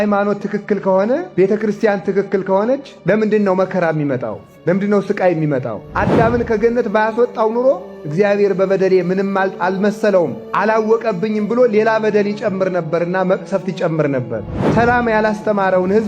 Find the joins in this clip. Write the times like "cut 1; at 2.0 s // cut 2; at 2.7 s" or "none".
cut 1; at 1.3 s // cut 2; at 5.8 s // cut 3; at 14.5 s